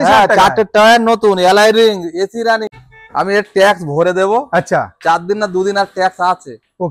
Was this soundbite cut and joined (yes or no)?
yes